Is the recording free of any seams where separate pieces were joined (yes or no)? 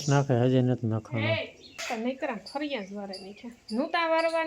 no